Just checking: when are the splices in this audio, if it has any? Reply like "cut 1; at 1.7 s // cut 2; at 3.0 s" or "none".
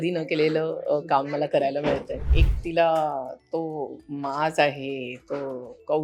cut 1; at 2.4 s